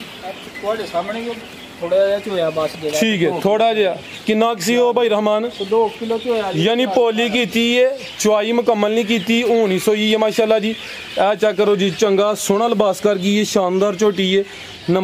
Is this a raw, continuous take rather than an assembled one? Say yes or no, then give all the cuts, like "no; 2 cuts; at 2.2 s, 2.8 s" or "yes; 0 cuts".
yes; 0 cuts